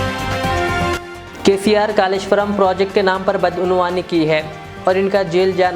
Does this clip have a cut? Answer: yes; 1 cut; at 0.9 s

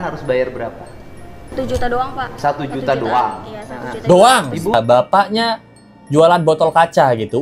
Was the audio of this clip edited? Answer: yes; 2 cuts; at 1.5 s, 4.7 s

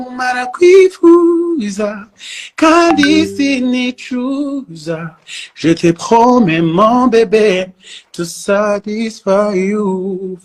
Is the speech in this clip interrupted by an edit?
no; 0 cuts

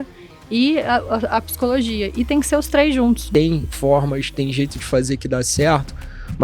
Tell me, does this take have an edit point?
yes; 1 cut; at 3.2 s

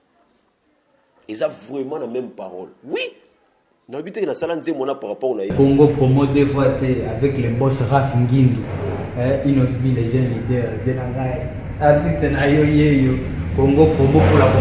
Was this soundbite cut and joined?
yes; 1 cut; at 5.5 s

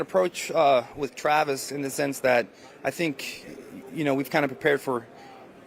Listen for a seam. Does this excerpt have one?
no; 0 cuts

